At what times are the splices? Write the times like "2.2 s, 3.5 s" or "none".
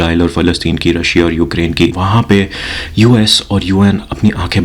2.0 s